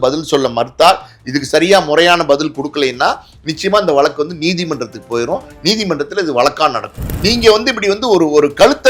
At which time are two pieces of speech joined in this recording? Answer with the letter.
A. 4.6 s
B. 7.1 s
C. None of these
B